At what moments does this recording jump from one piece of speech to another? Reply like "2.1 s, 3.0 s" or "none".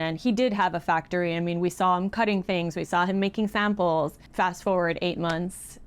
4.2 s